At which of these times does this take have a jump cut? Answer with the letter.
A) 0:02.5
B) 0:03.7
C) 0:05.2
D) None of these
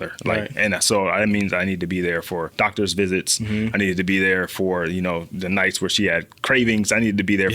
A